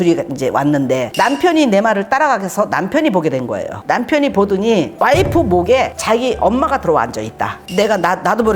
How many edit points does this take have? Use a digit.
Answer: 2